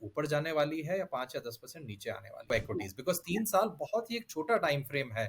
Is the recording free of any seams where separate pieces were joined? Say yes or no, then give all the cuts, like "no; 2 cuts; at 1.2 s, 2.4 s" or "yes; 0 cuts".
no; 1 cut; at 2.5 s